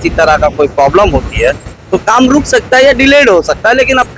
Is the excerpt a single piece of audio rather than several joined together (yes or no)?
yes